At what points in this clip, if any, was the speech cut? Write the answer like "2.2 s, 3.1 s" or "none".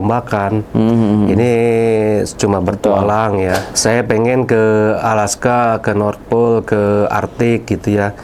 3.7 s

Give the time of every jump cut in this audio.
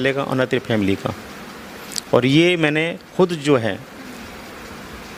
none

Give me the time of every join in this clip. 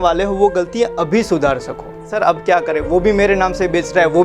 2.1 s

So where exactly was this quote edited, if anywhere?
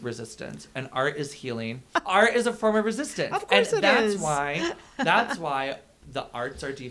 1.9 s

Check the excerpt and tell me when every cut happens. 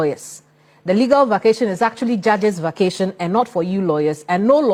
none

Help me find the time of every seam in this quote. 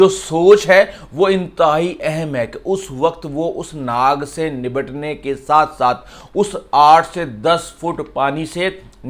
none

